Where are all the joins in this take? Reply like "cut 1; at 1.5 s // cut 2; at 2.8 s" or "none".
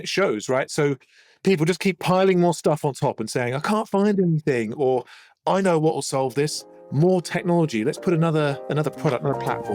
none